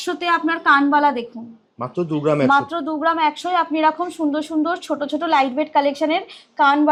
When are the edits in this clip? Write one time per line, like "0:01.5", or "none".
none